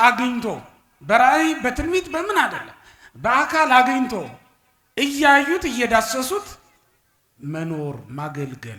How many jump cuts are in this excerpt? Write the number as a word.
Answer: zero